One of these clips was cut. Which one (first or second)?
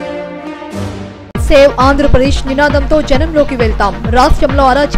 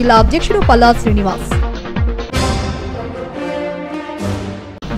first